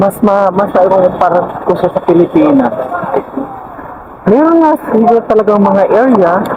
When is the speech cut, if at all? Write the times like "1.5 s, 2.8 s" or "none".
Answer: none